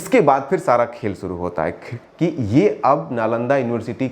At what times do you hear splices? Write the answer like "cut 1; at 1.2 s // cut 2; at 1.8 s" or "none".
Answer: cut 1; at 2.0 s